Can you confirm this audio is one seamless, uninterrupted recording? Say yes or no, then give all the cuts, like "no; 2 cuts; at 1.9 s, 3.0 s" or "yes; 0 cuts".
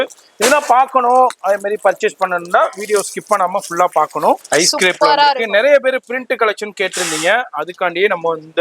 no; 1 cut; at 4.4 s